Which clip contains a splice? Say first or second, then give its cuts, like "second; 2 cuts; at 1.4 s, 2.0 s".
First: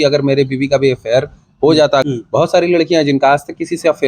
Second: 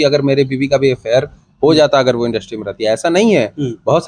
first; 1 cut; at 2.0 s